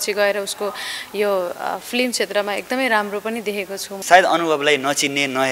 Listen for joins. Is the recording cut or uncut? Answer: cut